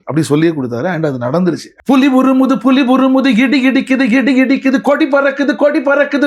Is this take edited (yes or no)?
yes